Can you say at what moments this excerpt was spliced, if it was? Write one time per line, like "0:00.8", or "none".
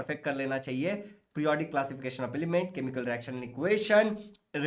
none